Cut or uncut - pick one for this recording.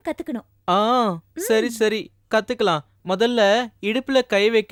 uncut